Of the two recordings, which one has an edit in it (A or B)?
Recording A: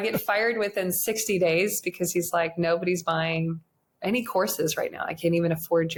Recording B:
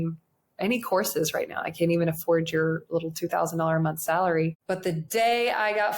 B